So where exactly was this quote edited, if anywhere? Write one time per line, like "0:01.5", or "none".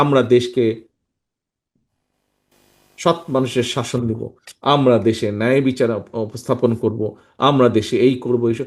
none